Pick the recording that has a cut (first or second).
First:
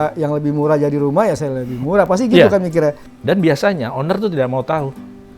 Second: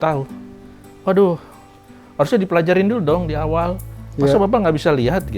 first